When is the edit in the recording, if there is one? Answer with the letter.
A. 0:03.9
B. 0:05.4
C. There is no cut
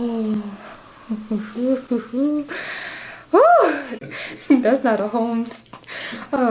A